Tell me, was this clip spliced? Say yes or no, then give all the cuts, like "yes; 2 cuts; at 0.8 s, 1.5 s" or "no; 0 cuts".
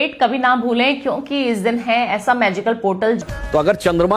yes; 1 cut; at 3.2 s